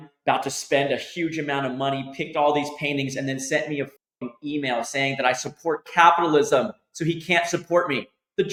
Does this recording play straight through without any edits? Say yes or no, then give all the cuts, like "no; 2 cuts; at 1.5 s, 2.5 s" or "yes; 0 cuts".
yes; 0 cuts